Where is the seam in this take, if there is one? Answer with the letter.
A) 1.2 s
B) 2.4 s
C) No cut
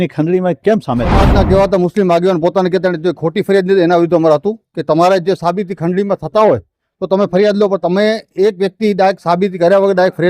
A